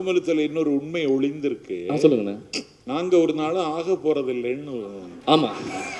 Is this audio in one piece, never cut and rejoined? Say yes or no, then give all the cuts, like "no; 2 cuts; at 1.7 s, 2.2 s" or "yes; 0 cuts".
yes; 0 cuts